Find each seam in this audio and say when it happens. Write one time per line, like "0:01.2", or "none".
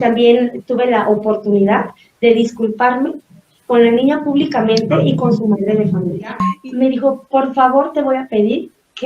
0:06.5

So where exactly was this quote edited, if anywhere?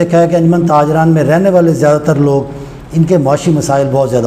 none

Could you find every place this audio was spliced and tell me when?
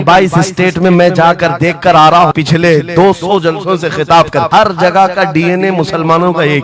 0:02.3
0:04.5

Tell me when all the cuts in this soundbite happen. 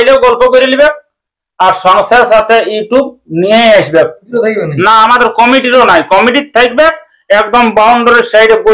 0:04.2

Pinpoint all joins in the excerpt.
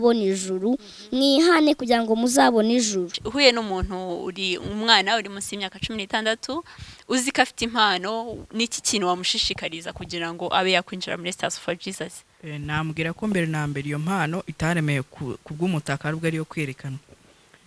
0:03.2

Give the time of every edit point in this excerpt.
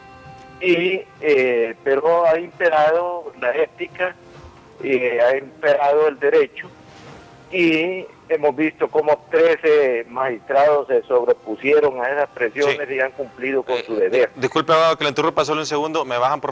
0:11.0

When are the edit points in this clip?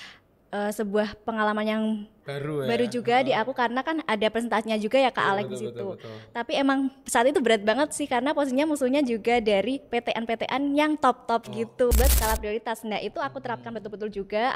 0:11.9

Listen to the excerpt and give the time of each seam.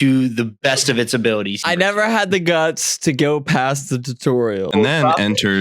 0:01.6
0:04.7

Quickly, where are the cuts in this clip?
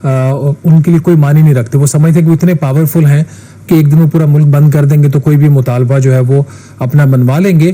none

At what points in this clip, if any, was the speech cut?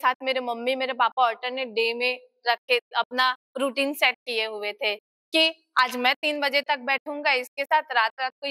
none

